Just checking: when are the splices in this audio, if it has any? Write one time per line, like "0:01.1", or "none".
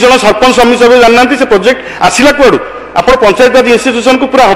none